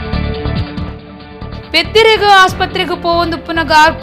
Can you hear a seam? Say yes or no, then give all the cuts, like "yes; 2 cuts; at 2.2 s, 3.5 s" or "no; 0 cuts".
yes; 1 cut; at 0.9 s